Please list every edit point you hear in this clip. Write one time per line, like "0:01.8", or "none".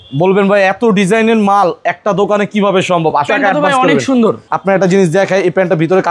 0:03.3
0:04.4